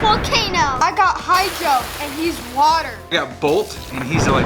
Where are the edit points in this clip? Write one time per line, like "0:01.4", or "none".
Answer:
0:00.8
0:03.1